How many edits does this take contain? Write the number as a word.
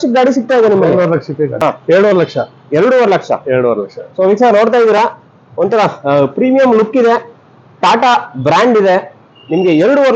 one